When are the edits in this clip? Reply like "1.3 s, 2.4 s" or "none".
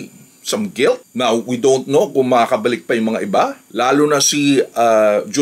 1.0 s, 3.6 s